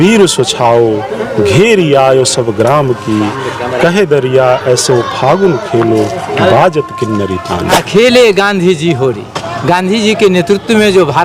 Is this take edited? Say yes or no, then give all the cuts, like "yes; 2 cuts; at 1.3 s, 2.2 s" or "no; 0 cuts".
yes; 1 cut; at 7.7 s